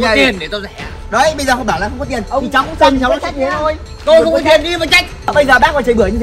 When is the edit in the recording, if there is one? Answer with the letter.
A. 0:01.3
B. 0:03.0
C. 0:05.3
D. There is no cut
C